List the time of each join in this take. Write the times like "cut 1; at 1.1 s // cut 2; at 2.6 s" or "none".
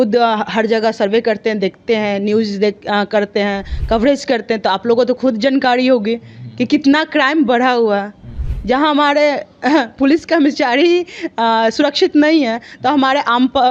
none